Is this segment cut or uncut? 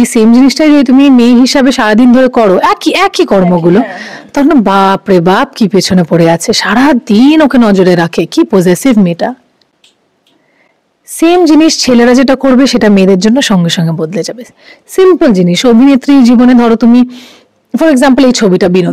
uncut